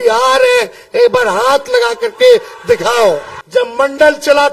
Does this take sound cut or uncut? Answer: cut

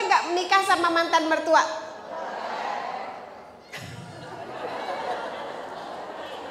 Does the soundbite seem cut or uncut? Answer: uncut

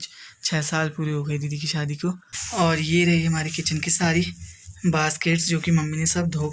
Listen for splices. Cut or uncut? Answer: cut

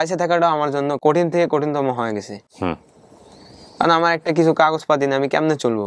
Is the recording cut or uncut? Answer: uncut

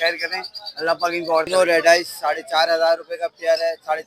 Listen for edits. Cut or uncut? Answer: cut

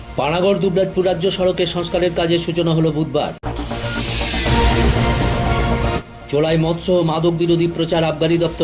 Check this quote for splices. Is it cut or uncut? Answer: uncut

